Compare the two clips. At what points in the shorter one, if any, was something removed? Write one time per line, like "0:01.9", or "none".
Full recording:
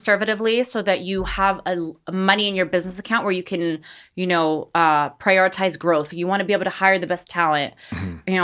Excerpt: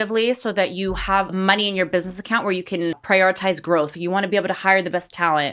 0:01.3
0:03.0